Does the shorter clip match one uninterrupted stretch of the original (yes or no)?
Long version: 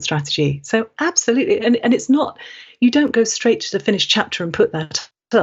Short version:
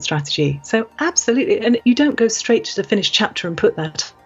no